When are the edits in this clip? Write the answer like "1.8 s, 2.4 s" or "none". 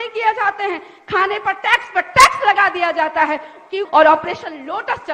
3.8 s

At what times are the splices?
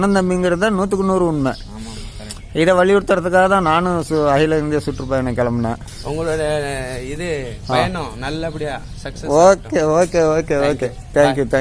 5.9 s

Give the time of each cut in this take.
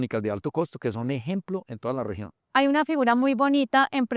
2.5 s

